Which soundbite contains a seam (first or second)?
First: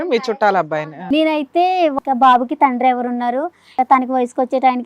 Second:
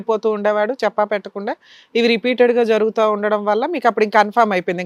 first